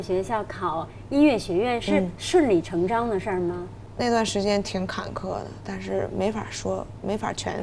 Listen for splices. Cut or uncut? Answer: uncut